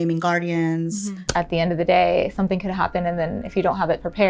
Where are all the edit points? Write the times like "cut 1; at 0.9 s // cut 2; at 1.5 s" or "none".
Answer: cut 1; at 1.1 s